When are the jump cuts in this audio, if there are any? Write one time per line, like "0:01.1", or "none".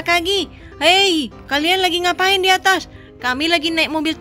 none